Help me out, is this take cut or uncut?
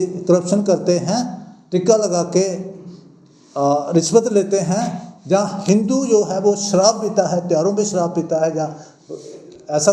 uncut